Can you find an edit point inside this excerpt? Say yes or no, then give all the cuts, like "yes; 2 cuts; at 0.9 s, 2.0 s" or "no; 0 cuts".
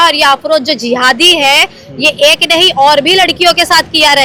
no; 0 cuts